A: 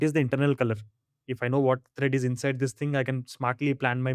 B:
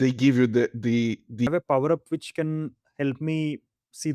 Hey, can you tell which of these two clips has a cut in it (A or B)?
B